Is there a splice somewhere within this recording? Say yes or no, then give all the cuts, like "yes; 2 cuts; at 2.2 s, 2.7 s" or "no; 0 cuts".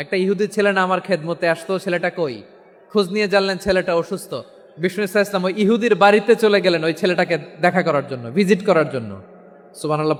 no; 0 cuts